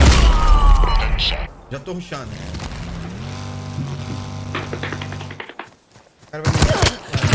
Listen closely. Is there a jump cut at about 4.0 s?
no; 1 cut; at 5.3 s

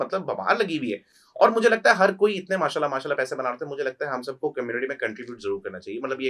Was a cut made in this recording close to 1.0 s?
no; 0 cuts

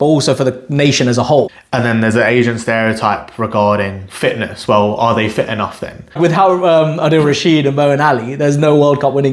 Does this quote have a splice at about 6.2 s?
yes; 2 cuts; at 1.6 s, 6.2 s

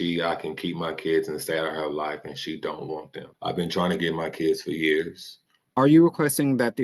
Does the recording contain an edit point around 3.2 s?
yes; 2 cuts; at 3.2 s, 5.7 s

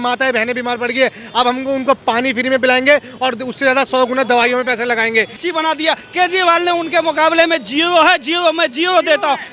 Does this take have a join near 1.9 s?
no; 1 cut; at 5.4 s

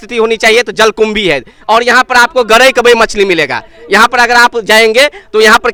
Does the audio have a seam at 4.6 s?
no; 0 cuts

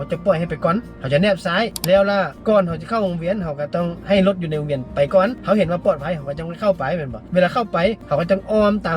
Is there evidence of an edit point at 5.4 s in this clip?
no; 2 cuts; at 0.9 s, 2.3 s

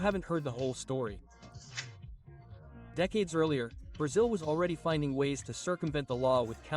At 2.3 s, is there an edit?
no; 1 cut; at 5.0 s

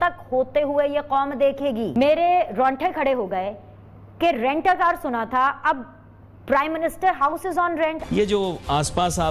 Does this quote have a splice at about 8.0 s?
yes; 2 cuts; at 1.9 s, 8.0 s

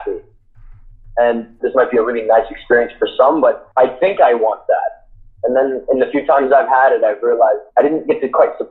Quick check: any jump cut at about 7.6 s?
yes; 3 cuts; at 1.6 s, 3.6 s, 7.6 s

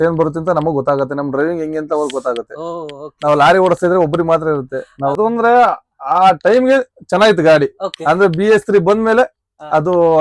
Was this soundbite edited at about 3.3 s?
no; 1 cut; at 5.2 s

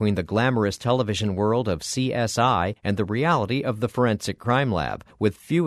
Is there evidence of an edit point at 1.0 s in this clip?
no; 1 cut; at 2.8 s

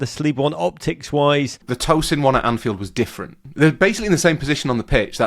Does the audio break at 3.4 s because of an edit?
yes; 2 cuts; at 1.7 s, 3.4 s

